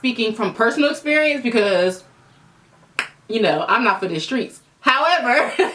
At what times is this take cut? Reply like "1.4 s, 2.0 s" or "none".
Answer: none